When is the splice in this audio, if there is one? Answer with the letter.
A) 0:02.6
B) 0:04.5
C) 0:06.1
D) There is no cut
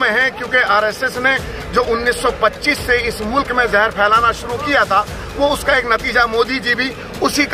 D